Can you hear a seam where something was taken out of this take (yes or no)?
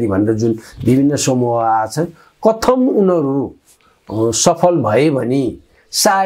no